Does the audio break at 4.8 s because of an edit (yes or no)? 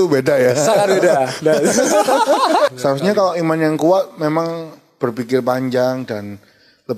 no